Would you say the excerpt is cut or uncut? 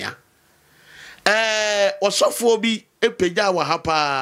uncut